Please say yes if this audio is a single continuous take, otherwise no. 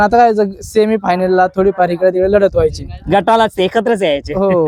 yes